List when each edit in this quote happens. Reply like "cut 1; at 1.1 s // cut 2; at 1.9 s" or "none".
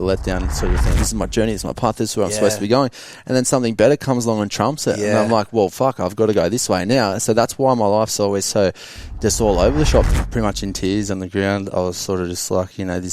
cut 1; at 1.0 s // cut 2; at 10.1 s